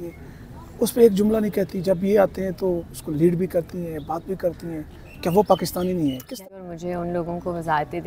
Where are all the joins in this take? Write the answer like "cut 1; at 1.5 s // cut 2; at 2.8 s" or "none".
cut 1; at 6.3 s